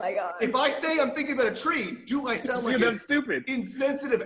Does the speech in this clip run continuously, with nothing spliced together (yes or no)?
yes